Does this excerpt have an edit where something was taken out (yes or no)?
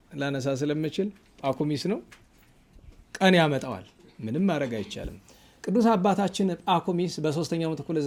no